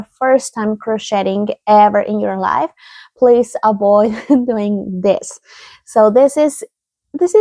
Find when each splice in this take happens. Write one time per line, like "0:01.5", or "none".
none